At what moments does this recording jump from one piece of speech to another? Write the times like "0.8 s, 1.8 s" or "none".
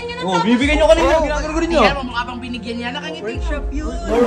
none